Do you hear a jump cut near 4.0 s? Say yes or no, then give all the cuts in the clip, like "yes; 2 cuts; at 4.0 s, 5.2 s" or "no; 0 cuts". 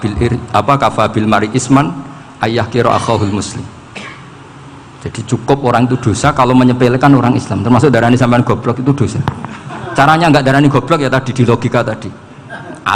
no; 0 cuts